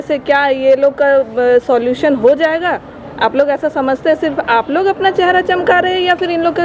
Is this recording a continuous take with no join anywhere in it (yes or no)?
yes